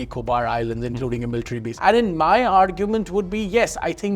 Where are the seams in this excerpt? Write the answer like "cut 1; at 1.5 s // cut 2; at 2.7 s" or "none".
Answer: cut 1; at 1.7 s